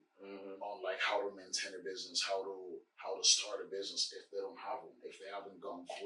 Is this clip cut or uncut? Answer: uncut